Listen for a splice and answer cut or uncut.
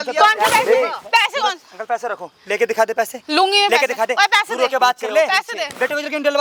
uncut